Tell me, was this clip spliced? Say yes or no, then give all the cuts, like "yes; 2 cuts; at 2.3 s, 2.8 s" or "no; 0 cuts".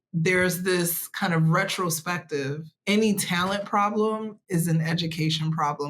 yes; 1 cut; at 2.7 s